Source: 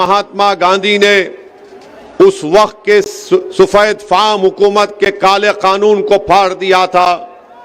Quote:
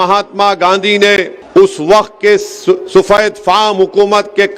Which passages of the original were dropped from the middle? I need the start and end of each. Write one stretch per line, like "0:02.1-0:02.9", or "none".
0:01.4-0:02.0